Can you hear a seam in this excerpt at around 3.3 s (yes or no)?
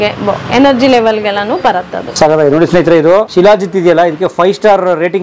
yes